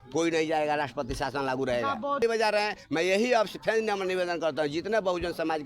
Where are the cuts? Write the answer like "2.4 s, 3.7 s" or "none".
2.2 s